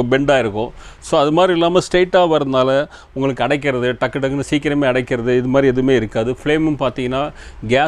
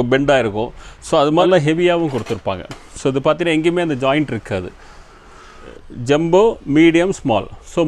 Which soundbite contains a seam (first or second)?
second